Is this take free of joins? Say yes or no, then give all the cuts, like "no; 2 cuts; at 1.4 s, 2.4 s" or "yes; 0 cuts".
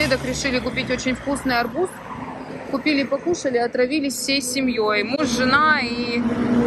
yes; 0 cuts